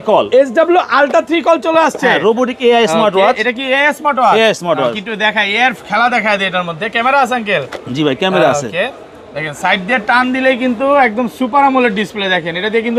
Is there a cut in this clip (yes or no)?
no